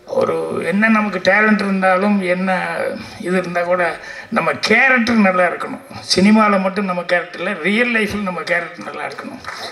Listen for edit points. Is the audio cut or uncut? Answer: uncut